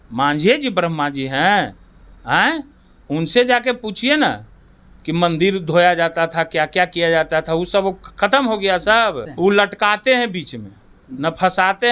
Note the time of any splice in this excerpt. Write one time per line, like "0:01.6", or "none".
0:09.3